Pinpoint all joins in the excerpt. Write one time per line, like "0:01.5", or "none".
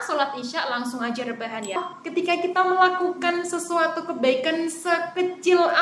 0:01.8